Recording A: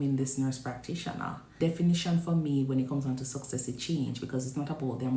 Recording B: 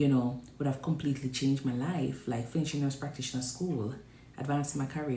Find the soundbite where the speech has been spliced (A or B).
A